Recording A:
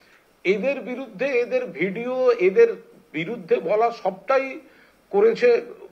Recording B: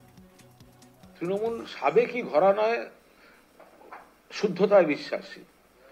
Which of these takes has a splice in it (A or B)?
B